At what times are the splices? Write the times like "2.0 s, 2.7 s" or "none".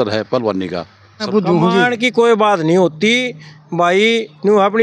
1.3 s